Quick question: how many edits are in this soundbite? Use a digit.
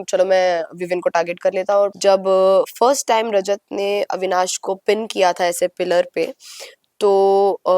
1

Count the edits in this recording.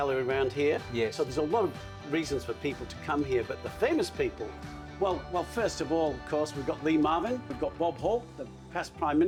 0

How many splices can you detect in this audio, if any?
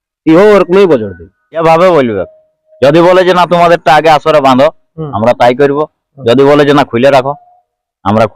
1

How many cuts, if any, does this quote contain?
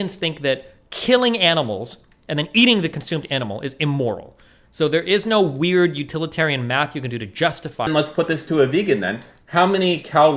1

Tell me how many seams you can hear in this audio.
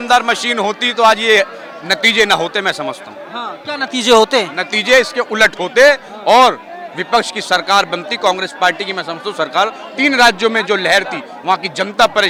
0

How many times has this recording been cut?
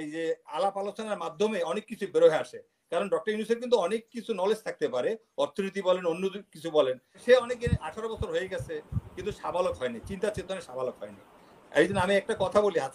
1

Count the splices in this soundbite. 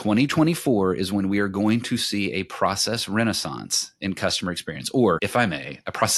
1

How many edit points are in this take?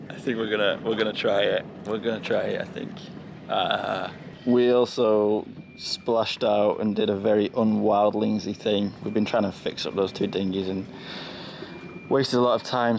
0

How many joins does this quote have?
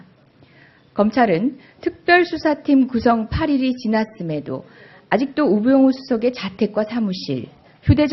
1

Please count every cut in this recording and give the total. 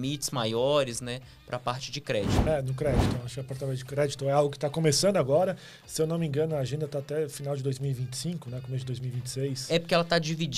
1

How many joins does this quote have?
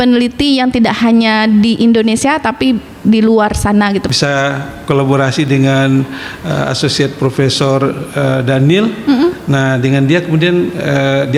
1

